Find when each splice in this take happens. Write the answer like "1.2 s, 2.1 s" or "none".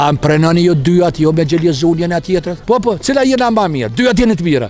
2.5 s